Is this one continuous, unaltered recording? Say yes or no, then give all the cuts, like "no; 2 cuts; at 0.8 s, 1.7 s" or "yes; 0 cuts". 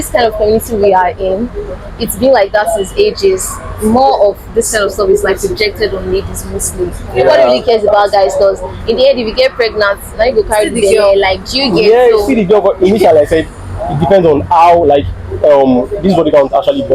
yes; 0 cuts